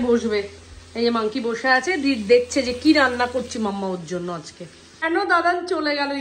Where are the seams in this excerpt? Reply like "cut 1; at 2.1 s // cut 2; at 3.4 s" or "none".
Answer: cut 1; at 5.0 s